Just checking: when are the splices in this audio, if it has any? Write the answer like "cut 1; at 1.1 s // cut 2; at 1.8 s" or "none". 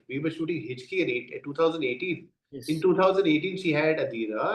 none